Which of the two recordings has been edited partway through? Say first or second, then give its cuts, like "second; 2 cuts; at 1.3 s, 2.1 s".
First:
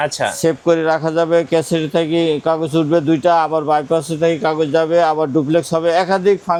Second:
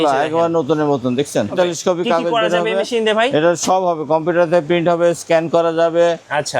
second; 1 cut; at 1.5 s